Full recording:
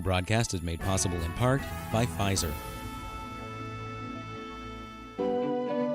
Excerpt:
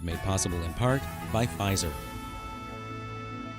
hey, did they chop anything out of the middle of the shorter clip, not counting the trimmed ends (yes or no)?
yes